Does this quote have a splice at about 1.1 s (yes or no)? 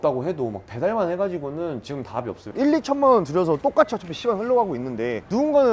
no